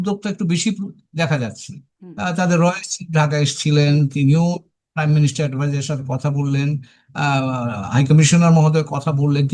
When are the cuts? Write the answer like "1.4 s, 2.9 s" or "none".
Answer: none